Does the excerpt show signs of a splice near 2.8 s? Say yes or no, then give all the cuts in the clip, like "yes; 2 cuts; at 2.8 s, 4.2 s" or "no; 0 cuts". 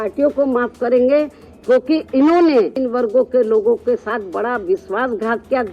yes; 1 cut; at 2.8 s